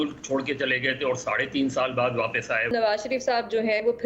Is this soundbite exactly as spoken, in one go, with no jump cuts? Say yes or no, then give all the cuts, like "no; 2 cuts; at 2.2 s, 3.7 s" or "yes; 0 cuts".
no; 1 cut; at 2.7 s